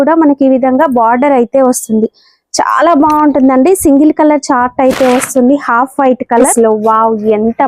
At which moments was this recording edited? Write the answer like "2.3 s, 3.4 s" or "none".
6.5 s